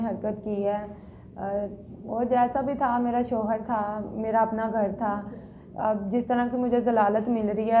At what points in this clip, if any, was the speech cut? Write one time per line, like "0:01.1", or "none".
none